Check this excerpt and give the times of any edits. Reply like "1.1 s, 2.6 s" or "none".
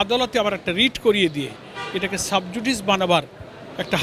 none